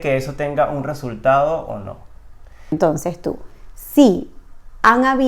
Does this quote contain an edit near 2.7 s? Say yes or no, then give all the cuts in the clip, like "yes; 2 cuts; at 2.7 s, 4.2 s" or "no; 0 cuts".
yes; 1 cut; at 2.7 s